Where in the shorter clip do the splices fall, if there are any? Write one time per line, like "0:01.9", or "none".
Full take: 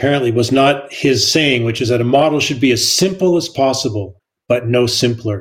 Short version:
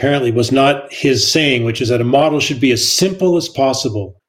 none